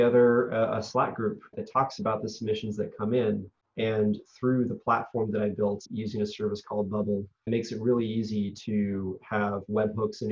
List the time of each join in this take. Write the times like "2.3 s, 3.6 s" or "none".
1.6 s, 3.6 s, 5.9 s, 7.5 s